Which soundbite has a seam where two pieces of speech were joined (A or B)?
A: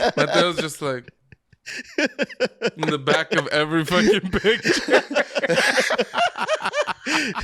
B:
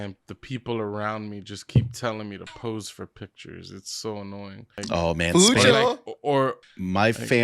B